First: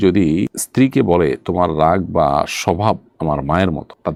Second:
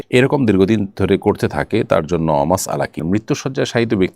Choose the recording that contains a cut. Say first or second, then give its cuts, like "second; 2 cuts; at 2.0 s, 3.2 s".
second; 1 cut; at 3.0 s